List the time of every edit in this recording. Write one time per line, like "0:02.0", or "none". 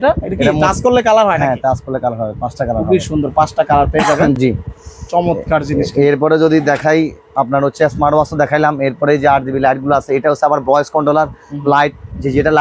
none